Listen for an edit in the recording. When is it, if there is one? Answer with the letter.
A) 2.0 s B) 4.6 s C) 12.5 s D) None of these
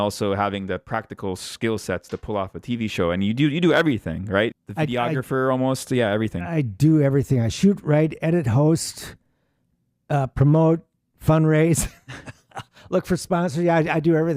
B